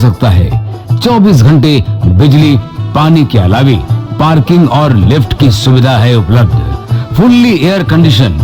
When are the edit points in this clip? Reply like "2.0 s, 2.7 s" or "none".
none